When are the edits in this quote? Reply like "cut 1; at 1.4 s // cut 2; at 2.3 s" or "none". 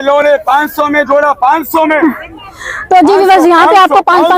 none